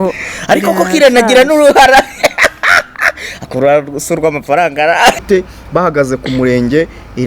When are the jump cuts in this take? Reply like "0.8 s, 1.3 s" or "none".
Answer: 5.2 s